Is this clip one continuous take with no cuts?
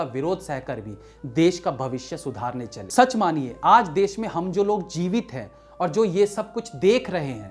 no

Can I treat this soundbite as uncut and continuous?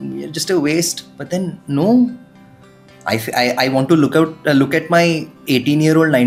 yes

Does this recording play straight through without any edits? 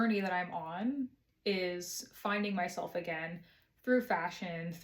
yes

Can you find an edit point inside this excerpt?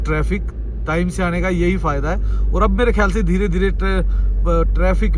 no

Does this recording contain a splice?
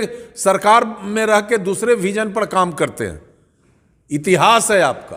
no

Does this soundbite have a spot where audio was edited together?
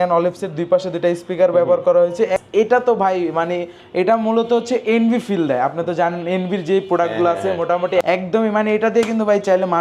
yes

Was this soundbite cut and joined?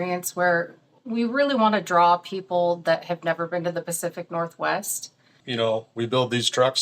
yes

